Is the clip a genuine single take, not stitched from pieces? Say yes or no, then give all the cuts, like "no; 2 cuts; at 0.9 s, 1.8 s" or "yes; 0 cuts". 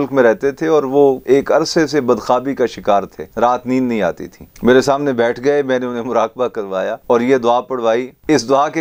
no; 2 cuts; at 1.2 s, 3.2 s